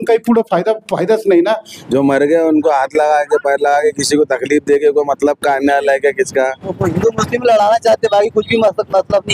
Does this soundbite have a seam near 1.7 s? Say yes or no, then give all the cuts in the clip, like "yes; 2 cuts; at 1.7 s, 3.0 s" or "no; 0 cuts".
yes; 2 cuts; at 1.7 s, 6.7 s